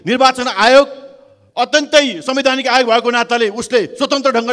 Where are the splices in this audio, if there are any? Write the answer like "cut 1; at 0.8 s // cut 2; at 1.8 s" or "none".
none